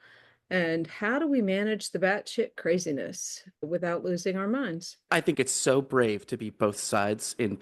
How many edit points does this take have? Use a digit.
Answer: 1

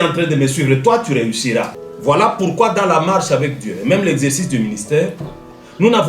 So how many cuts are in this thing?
1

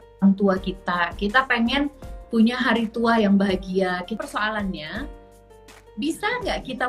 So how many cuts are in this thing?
1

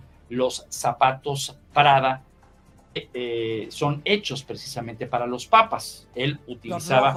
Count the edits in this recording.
0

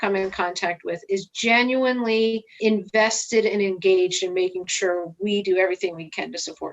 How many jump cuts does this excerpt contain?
1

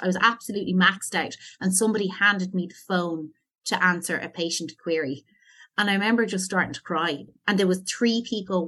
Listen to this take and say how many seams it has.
1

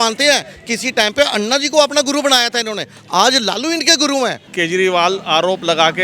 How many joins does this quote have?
1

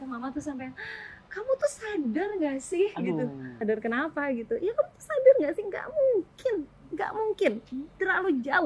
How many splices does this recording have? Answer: 1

